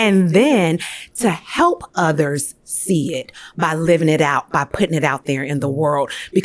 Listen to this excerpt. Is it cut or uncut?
uncut